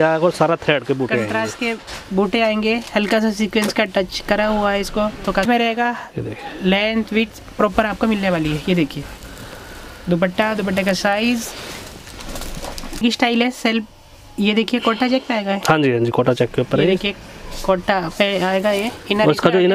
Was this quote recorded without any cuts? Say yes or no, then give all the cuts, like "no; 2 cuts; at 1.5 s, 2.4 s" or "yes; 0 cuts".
no; 2 cuts; at 5.4 s, 13.0 s